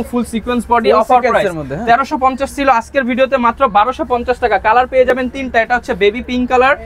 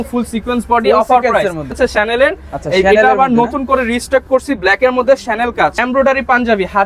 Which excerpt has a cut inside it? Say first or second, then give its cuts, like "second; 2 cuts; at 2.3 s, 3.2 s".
second; 2 cuts; at 1.8 s, 5.8 s